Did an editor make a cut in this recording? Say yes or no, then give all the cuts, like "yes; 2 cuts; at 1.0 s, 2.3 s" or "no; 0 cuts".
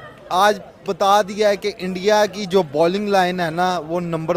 no; 0 cuts